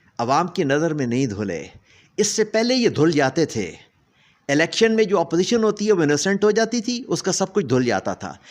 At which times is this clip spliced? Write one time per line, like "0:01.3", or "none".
none